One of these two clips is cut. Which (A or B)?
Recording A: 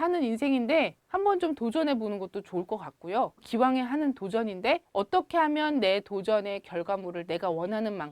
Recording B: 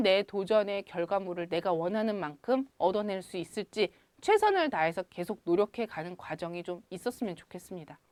A